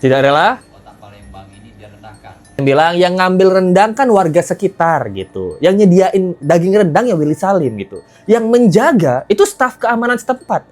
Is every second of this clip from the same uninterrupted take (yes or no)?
no